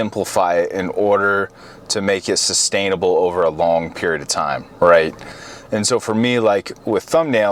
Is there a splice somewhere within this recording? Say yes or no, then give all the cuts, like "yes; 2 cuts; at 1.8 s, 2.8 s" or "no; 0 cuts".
no; 0 cuts